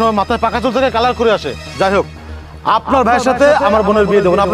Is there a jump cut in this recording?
no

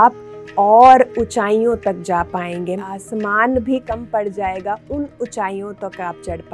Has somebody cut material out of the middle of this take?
yes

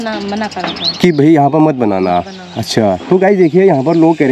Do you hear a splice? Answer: no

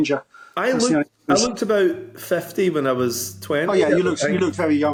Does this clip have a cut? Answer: no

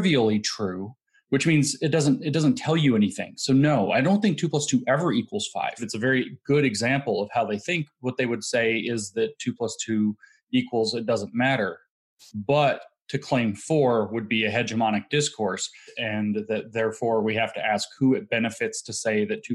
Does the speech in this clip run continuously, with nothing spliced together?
no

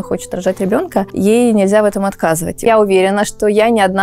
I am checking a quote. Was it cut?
yes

